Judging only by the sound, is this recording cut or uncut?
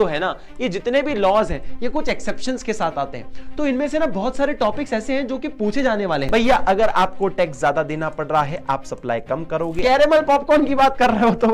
cut